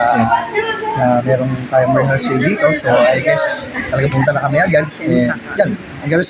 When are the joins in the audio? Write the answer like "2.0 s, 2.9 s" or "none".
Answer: none